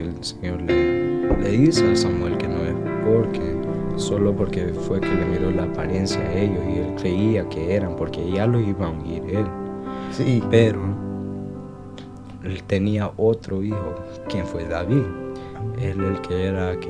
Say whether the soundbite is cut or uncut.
uncut